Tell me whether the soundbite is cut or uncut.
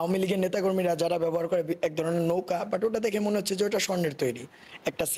uncut